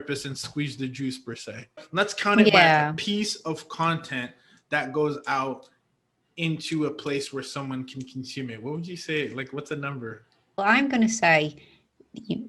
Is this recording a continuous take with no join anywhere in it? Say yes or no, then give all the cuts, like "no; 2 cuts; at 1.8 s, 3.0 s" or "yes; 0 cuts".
no; 2 cuts; at 1.8 s, 10.6 s